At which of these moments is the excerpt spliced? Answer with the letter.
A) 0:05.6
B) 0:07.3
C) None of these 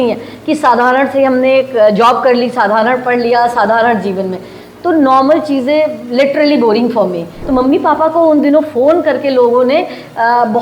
B